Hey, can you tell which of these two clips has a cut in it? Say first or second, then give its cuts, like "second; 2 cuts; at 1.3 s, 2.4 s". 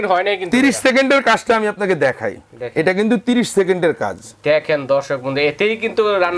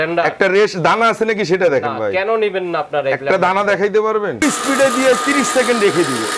second; 1 cut; at 4.4 s